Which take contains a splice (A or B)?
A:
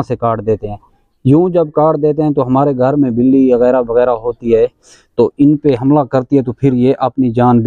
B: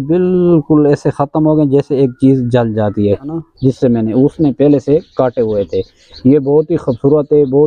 B